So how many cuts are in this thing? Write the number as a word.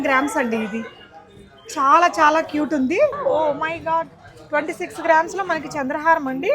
one